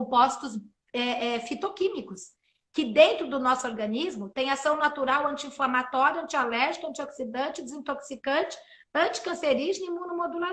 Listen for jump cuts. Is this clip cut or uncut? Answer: uncut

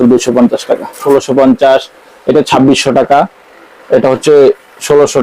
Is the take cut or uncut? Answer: cut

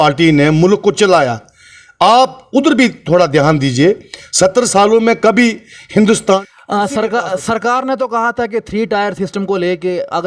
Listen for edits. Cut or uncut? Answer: cut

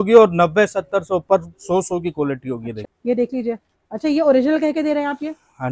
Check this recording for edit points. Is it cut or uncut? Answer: cut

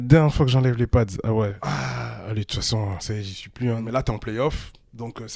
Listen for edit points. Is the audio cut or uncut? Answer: cut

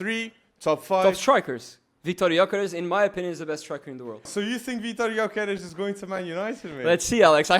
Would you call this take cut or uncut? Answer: cut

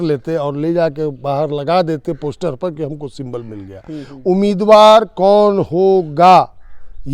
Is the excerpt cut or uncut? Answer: uncut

